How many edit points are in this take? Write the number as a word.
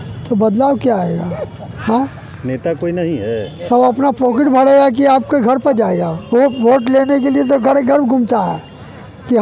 one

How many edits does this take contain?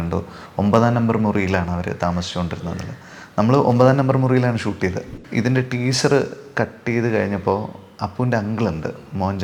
one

